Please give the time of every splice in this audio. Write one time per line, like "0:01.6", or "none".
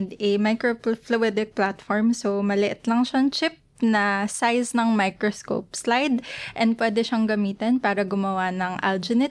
none